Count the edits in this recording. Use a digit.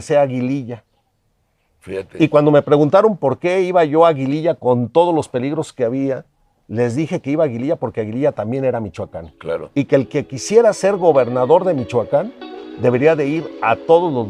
0